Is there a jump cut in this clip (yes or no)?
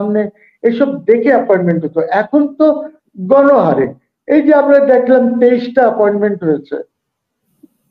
no